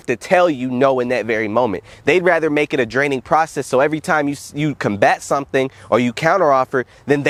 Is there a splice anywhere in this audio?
no; 0 cuts

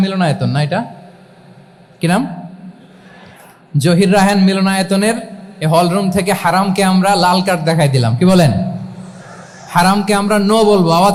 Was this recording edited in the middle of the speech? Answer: no; 0 cuts

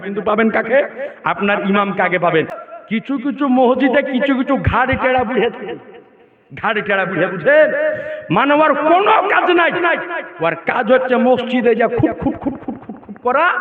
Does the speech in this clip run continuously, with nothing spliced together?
no; 1 cut; at 2.6 s

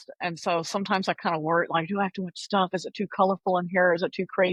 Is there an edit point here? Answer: no; 0 cuts

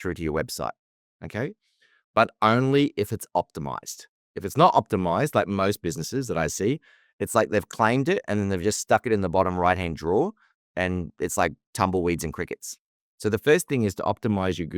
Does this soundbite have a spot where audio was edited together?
yes; 1 cut; at 12.9 s

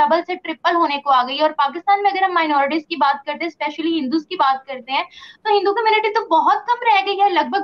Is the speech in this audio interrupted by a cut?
no; 0 cuts

